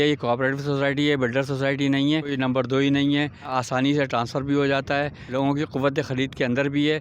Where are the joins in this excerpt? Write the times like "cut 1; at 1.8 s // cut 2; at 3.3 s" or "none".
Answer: cut 1; at 2.3 s // cut 2; at 3.5 s // cut 3; at 5.2 s